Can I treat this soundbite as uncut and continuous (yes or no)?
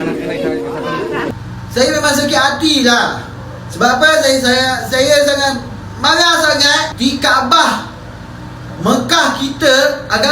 no